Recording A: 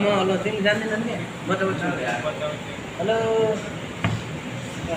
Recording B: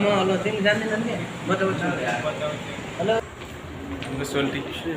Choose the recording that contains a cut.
B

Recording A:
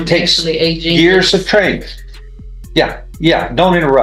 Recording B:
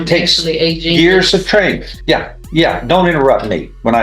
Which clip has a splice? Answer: B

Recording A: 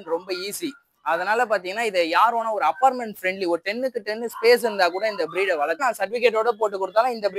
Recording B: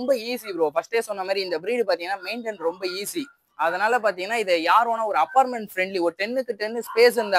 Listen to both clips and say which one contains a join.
A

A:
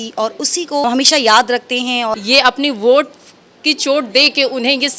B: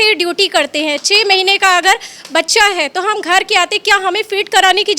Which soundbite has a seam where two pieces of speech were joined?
A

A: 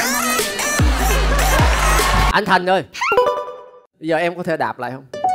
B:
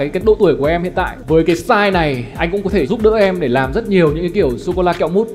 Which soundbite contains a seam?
A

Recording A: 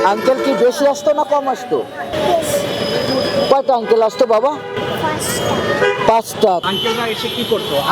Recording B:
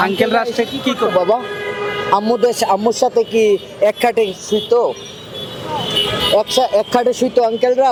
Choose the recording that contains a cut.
A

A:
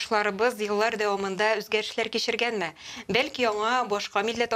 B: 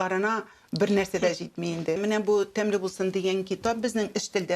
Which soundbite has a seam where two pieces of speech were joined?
B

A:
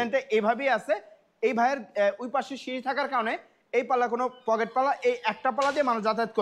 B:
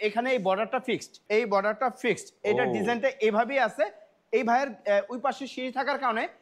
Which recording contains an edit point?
B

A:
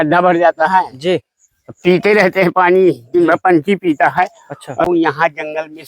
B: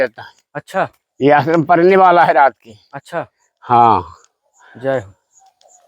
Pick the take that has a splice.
A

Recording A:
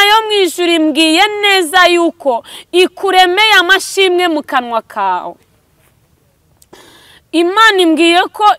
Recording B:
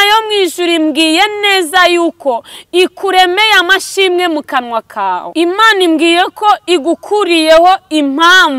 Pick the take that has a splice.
B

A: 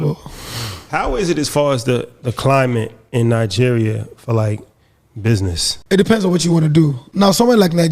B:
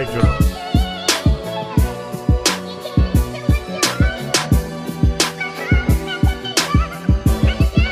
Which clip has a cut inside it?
A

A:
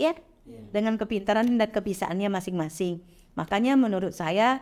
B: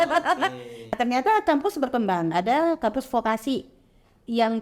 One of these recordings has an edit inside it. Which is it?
B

